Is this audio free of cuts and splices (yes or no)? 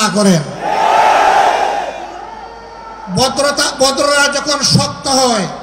yes